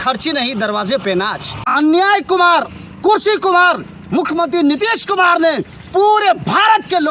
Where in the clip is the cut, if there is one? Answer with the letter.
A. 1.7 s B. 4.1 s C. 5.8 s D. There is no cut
A